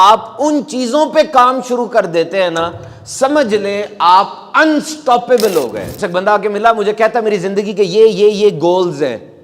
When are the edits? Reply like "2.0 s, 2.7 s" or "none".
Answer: 5.9 s